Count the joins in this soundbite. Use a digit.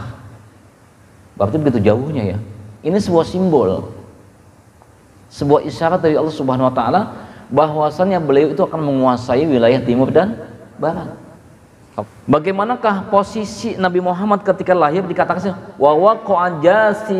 1